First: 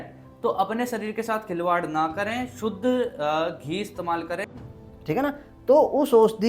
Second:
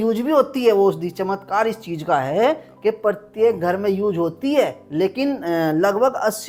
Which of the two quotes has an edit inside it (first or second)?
first